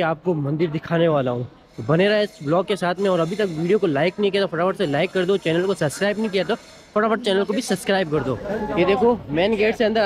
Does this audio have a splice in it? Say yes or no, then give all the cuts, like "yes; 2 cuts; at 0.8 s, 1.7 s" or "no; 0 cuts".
no; 0 cuts